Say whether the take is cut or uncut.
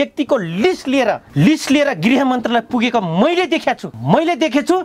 cut